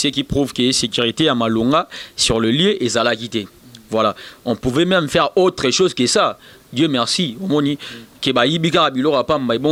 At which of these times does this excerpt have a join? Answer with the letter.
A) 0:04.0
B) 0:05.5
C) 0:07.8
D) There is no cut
D